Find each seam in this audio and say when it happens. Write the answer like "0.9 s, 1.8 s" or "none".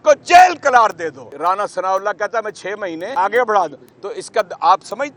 1.3 s, 3.1 s